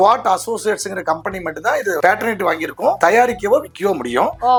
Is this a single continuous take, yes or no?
yes